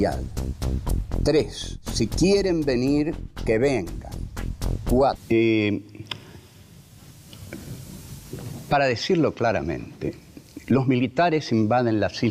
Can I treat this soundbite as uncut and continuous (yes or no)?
yes